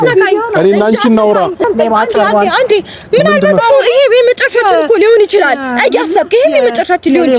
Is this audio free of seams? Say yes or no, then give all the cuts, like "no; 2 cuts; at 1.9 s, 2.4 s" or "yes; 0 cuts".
no; 1 cut; at 1.7 s